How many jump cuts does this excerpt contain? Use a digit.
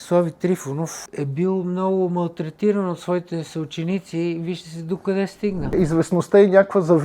2